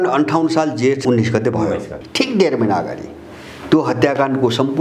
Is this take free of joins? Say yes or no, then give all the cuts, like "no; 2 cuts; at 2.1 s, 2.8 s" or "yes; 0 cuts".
no; 1 cut; at 1.0 s